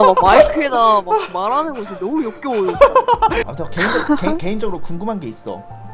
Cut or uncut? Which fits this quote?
cut